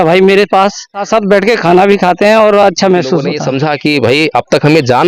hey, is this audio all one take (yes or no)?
no